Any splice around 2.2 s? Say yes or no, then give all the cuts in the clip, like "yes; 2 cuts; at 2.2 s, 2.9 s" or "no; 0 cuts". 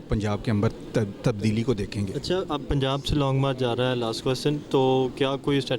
no; 0 cuts